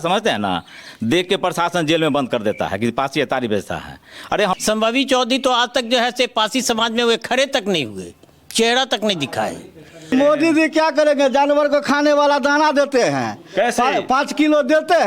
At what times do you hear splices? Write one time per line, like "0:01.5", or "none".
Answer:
0:04.5
0:10.1